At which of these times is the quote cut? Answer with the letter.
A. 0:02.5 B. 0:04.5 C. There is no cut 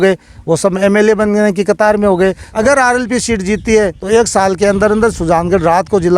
A